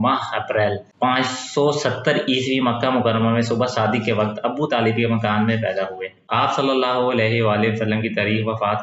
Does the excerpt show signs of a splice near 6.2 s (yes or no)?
yes